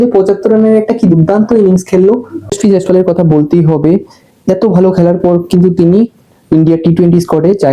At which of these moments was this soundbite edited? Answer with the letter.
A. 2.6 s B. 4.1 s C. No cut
A